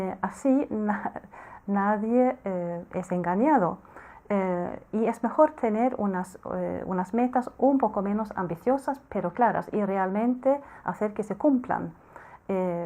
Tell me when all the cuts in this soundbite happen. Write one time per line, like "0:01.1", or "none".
none